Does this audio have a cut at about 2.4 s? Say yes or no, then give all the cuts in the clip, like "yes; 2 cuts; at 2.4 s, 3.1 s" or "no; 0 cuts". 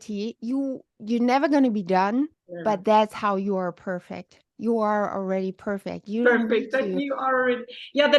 yes; 1 cut; at 2.4 s